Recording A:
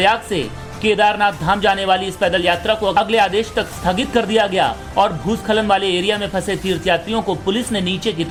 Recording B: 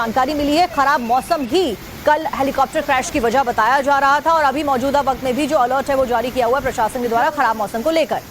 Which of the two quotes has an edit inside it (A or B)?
B